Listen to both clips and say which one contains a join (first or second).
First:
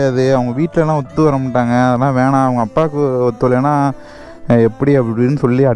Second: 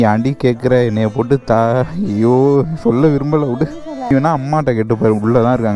second